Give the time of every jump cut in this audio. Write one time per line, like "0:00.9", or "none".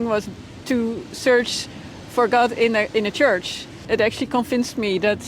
0:03.8